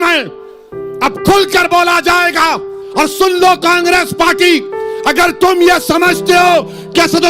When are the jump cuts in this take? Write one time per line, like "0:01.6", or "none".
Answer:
0:02.8